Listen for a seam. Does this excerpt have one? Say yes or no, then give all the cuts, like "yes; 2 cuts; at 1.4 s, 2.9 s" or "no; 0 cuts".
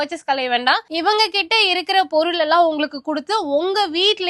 no; 0 cuts